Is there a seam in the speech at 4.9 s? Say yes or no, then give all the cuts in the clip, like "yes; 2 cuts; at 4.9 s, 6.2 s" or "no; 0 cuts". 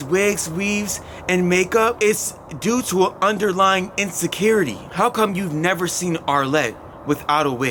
no; 0 cuts